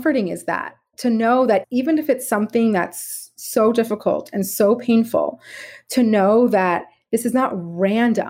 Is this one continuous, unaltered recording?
no; 2 cuts; at 0.9 s, 1.6 s

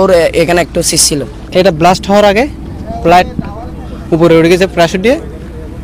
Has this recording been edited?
yes; 1 cut; at 1.4 s

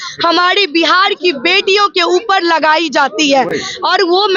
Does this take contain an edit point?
no; 0 cuts

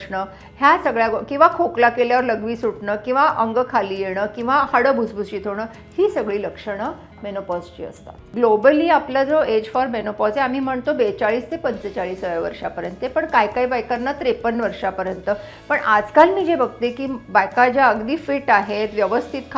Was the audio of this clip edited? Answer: yes; 1 cut; at 8.3 s

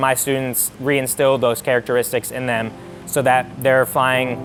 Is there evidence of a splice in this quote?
no; 0 cuts

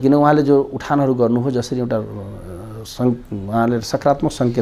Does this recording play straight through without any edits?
yes; 0 cuts

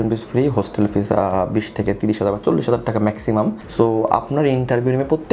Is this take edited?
no; 0 cuts

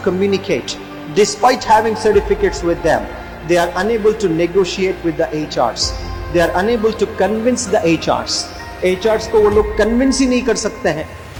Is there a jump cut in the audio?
no; 0 cuts

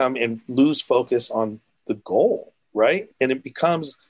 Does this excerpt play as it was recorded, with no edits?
no; 1 cut; at 3.1 s

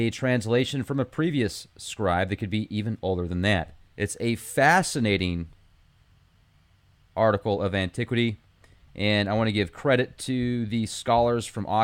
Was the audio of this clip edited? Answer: yes; 1 cut; at 3.3 s

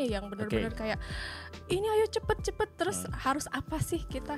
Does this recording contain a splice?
no; 0 cuts

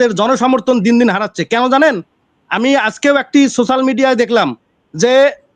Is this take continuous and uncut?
yes; 0 cuts

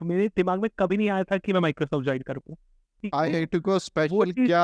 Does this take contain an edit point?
yes; 1 cut; at 3.0 s

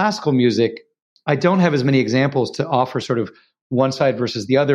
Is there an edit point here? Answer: no; 0 cuts

